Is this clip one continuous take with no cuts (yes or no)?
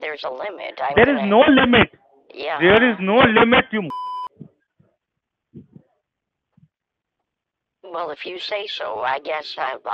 yes